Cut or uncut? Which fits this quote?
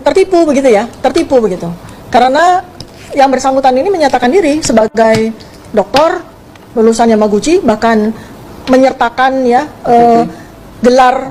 uncut